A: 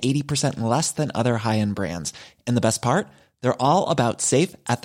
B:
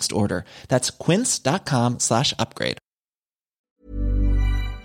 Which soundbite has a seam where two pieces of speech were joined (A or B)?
B